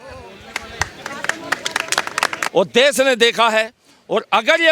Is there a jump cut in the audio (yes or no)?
yes